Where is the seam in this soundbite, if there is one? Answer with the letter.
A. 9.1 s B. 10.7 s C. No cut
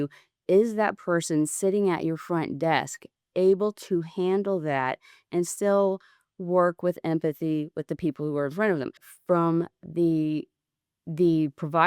A